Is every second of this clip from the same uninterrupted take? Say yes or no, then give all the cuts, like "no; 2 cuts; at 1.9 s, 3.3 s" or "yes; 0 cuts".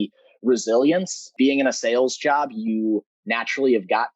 no; 1 cut; at 1.2 s